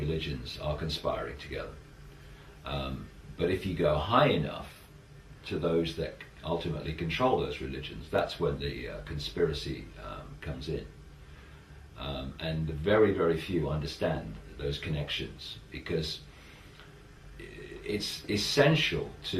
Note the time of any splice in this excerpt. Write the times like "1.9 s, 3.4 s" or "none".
3.2 s